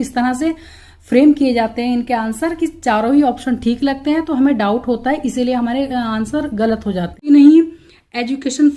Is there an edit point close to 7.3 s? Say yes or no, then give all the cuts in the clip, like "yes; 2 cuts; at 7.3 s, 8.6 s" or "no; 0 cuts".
yes; 1 cut; at 7.3 s